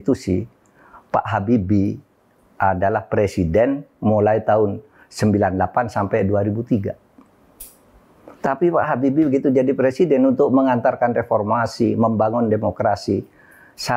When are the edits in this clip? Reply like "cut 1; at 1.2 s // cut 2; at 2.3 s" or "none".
none